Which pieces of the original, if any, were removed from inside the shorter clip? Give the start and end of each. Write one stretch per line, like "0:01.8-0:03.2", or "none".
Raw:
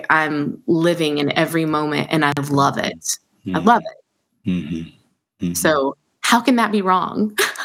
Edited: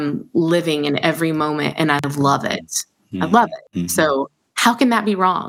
0:04.0-0:05.3